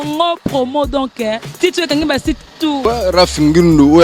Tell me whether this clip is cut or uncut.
cut